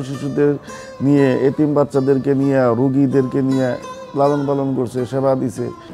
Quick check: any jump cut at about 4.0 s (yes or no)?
no